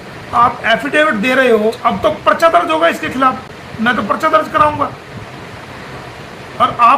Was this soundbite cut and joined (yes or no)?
yes